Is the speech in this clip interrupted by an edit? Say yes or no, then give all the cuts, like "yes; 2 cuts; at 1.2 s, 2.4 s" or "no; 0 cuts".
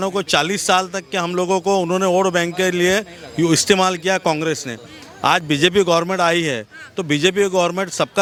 no; 0 cuts